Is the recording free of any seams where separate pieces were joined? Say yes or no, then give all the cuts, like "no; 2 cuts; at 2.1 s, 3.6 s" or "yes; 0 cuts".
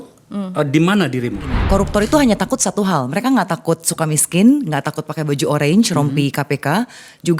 no; 1 cut; at 1.6 s